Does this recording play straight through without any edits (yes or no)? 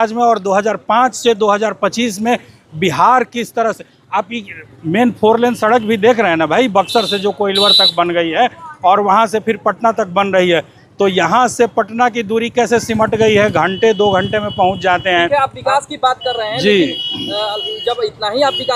yes